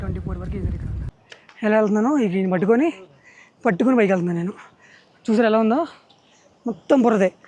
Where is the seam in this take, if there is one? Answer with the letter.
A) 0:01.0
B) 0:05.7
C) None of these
A